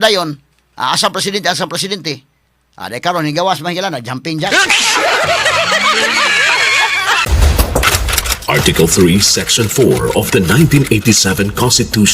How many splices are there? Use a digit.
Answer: 1